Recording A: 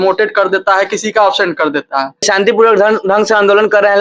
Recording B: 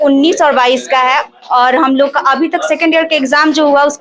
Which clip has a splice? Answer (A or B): A